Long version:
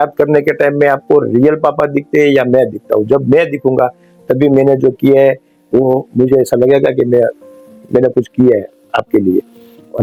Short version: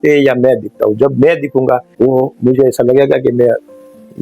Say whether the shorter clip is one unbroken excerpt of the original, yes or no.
no